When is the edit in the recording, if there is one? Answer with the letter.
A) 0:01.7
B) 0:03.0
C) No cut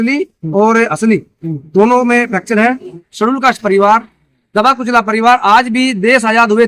B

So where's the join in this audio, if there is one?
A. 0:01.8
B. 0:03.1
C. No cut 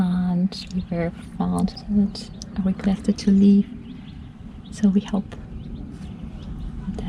A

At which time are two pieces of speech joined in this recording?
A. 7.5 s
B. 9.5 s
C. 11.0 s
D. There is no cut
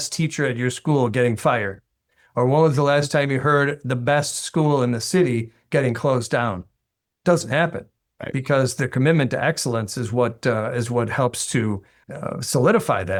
D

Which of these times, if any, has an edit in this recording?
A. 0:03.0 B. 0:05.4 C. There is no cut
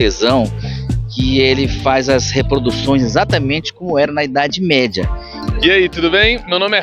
B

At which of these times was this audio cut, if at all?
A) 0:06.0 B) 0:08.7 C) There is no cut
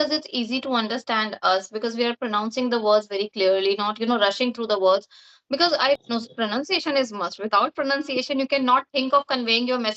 A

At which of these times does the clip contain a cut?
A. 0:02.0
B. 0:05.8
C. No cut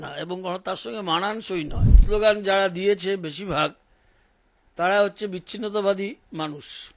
A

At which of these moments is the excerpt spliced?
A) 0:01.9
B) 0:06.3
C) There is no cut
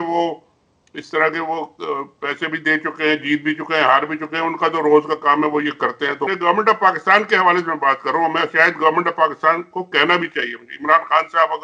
B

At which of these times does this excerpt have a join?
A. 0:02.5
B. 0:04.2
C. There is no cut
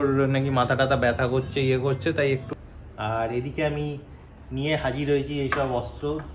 A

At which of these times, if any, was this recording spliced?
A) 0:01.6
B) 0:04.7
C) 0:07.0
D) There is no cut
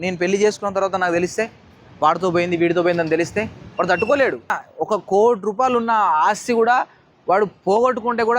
B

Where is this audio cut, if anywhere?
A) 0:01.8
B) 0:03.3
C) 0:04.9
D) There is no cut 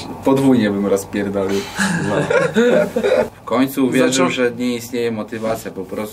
B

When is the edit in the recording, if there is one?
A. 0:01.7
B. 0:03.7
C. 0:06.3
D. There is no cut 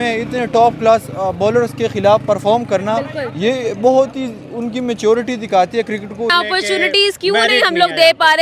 C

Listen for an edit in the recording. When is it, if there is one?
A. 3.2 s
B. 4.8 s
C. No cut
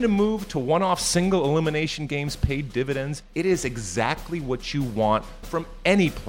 A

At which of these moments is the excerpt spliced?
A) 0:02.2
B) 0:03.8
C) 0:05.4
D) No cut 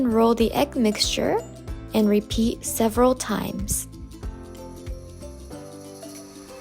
B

